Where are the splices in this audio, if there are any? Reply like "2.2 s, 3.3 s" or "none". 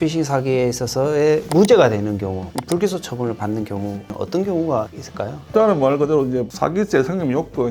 4.1 s